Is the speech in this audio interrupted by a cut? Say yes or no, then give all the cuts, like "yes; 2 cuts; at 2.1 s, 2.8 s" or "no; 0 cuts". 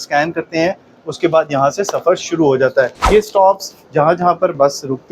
yes; 1 cut; at 3.0 s